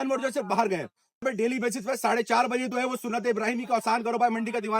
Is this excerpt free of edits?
no; 1 cut; at 1.2 s

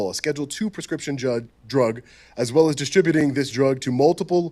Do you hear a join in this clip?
no; 0 cuts

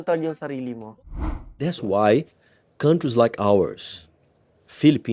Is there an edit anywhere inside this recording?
yes; 1 cut; at 1.3 s

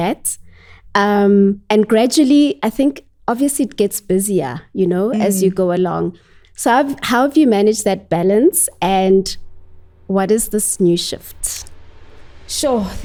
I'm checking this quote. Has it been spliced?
no; 0 cuts

